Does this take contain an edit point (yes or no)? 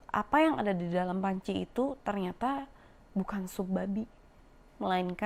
no